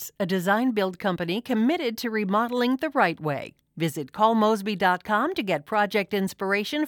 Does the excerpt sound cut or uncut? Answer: uncut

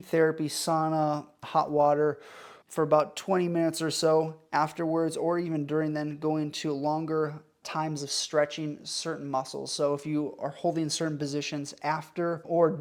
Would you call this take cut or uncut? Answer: uncut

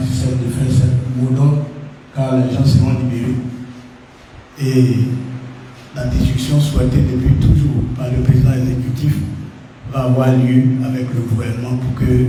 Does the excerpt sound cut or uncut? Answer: uncut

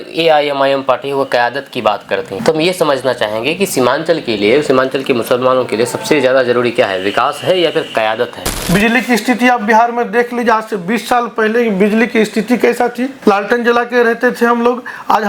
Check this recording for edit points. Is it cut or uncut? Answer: cut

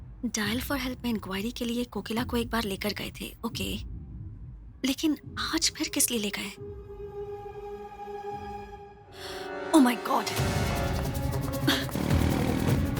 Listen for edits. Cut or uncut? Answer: uncut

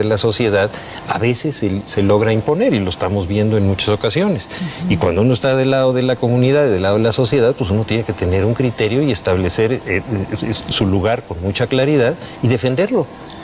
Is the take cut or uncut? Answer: cut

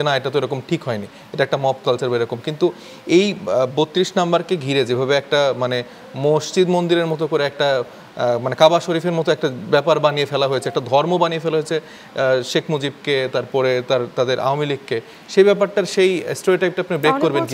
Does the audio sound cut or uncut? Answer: uncut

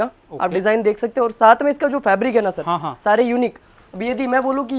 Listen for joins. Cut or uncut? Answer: uncut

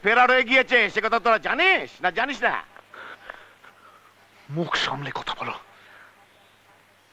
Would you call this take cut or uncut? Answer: uncut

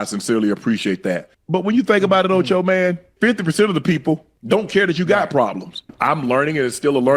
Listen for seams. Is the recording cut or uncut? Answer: cut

